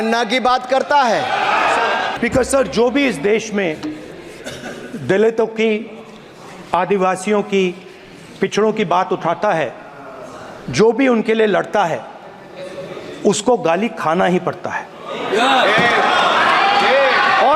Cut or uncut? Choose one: cut